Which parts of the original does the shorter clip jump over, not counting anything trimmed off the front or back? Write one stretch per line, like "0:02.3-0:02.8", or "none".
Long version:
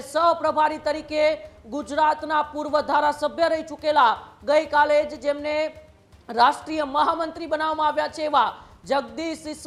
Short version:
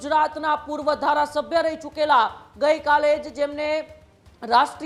none

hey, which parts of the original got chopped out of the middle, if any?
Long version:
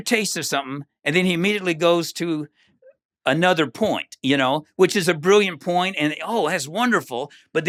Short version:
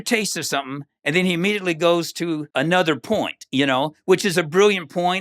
0:02.5-0:03.2

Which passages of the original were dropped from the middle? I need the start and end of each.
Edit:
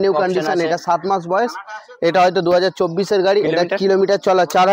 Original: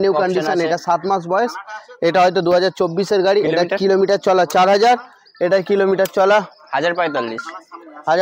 none

